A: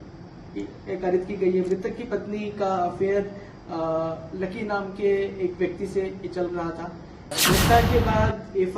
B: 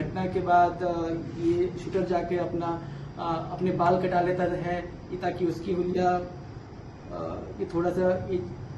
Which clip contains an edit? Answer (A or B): A